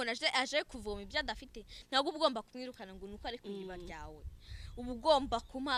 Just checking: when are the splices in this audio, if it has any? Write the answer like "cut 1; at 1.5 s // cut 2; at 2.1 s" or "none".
none